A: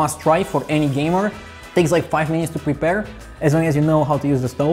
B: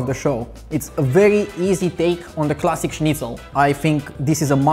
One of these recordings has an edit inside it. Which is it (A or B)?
B